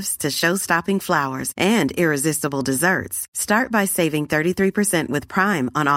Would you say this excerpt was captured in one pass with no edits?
yes; 0 cuts

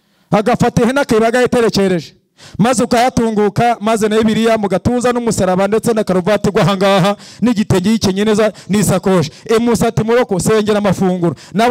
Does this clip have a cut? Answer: no; 0 cuts

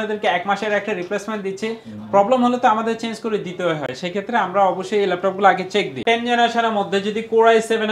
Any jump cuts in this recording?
yes; 1 cut; at 5.9 s

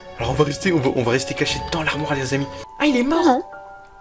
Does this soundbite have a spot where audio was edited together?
yes; 1 cut; at 2.6 s

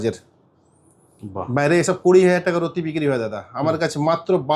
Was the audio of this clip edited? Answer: no; 0 cuts

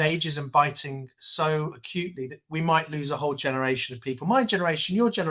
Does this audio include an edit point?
no; 0 cuts

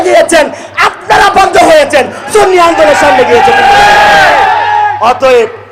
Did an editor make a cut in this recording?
no; 0 cuts

